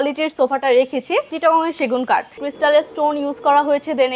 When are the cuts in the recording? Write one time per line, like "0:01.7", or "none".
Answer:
0:01.3
0:02.3